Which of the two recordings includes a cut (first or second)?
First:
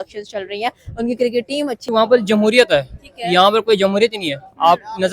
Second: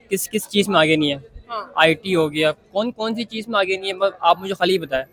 first